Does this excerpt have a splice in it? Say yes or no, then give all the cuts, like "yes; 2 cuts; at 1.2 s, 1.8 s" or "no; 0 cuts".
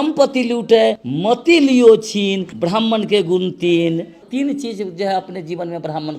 yes; 3 cuts; at 1.1 s, 2.5 s, 4.2 s